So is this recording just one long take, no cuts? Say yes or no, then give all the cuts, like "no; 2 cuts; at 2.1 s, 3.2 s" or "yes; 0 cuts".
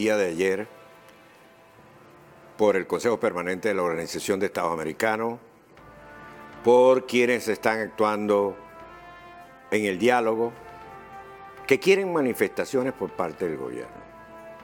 no; 1 cut; at 7.1 s